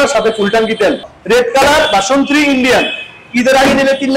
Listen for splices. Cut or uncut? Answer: cut